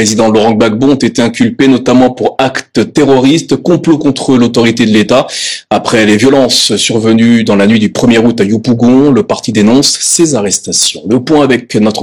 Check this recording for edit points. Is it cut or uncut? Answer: uncut